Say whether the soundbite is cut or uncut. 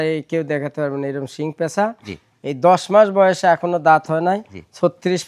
uncut